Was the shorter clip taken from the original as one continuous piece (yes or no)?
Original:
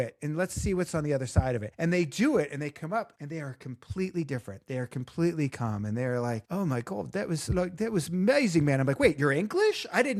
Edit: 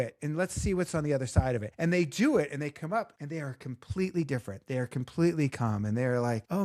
yes